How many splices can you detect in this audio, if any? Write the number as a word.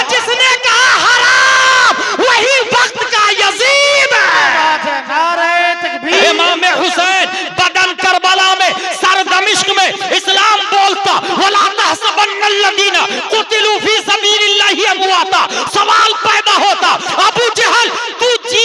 one